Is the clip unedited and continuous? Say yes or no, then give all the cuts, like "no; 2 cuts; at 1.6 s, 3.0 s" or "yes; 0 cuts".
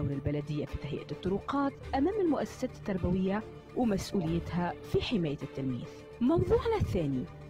yes; 0 cuts